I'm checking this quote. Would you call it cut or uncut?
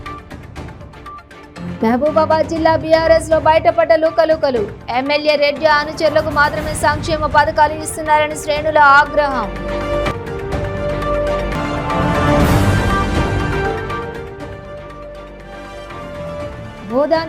uncut